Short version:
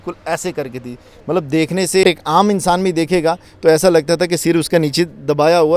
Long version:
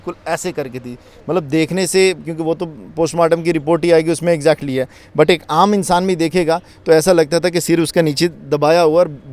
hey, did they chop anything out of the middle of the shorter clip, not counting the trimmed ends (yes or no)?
yes